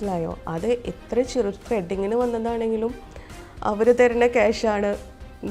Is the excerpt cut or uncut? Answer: uncut